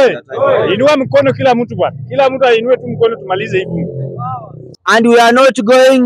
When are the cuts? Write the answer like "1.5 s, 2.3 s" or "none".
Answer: 4.7 s